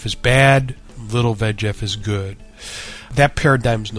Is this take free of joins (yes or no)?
no